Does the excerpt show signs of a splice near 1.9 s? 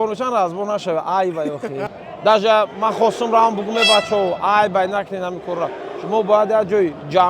yes; 1 cut; at 1.9 s

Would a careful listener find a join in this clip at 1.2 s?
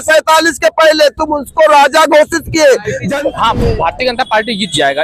no; 1 cut; at 3.0 s

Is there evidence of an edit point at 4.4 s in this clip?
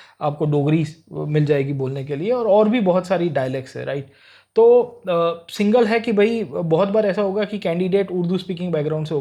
no; 0 cuts

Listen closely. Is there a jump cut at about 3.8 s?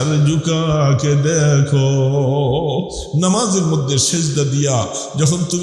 no; 0 cuts

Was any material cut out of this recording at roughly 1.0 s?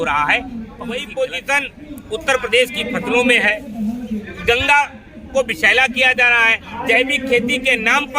yes; 1 cut; at 1.0 s

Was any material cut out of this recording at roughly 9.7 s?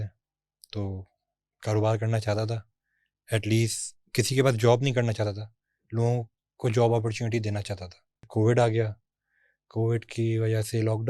no; 1 cut; at 8.3 s

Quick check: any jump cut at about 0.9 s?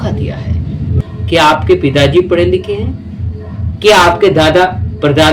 yes; 1 cut; at 0.9 s

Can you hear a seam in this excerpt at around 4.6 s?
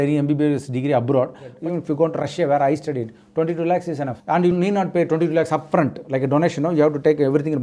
no; 1 cut; at 1.5 s

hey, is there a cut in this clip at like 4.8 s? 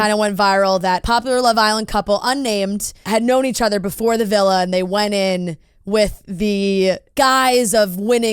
no; 3 cuts; at 1.0 s, 3.0 s, 7.1 s

